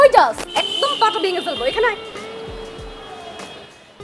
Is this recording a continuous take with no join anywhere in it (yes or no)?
yes